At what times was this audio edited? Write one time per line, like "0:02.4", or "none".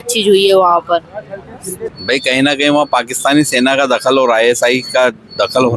0:01.9